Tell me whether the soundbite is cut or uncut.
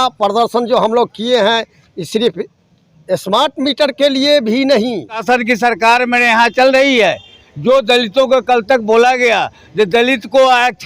cut